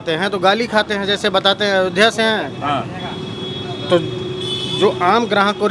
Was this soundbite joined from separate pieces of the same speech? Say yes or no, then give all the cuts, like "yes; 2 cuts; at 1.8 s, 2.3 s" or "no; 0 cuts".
no; 0 cuts